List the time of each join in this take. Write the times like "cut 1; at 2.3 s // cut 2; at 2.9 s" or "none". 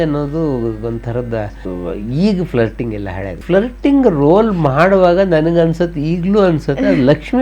cut 1; at 1.6 s // cut 2; at 3.4 s